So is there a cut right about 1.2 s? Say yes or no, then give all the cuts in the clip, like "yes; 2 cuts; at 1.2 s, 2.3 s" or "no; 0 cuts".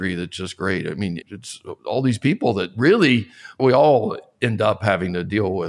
yes; 2 cuts; at 1.2 s, 3.6 s